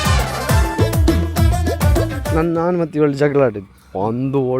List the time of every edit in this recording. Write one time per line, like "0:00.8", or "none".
0:02.2